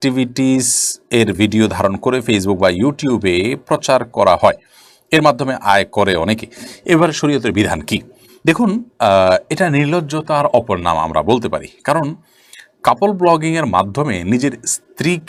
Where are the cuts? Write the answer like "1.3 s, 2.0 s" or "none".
none